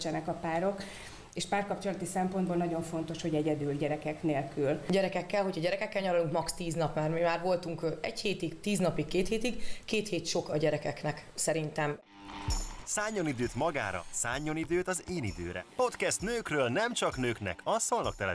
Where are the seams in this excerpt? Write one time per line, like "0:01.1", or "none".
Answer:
0:04.8
0:12.0